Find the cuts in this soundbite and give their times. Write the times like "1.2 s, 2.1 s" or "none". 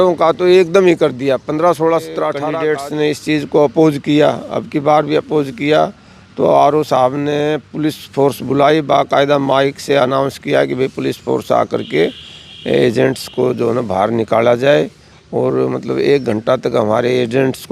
2.4 s